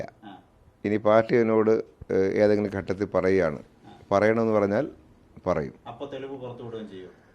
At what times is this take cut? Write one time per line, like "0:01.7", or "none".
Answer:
none